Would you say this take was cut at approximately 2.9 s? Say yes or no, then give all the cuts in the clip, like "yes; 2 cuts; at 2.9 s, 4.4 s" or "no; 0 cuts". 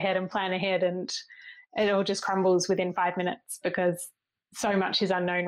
no; 1 cut; at 4.3 s